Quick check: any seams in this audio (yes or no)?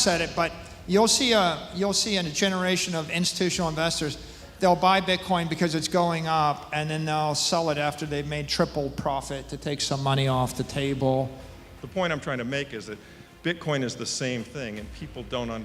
yes